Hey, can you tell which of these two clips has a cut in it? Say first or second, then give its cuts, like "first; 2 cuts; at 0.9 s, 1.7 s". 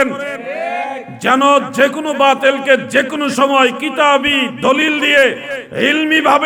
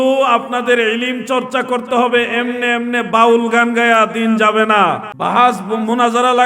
second; 1 cut; at 5.1 s